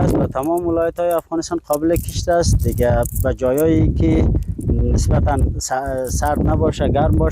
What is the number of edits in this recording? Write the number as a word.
zero